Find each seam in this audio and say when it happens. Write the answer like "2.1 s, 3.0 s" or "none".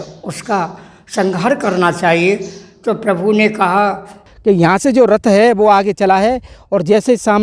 4.3 s